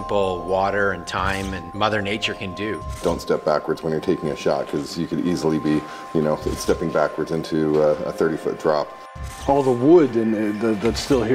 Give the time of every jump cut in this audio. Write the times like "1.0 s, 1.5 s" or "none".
1.7 s, 3.0 s, 9.1 s